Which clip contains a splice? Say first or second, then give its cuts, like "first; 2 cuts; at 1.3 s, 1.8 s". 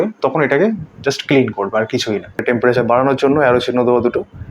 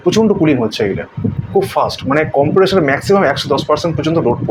first; 1 cut; at 2.4 s